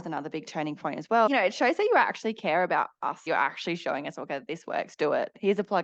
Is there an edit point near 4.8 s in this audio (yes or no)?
no